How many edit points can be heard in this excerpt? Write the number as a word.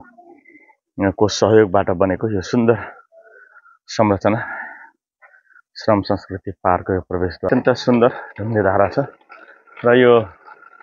one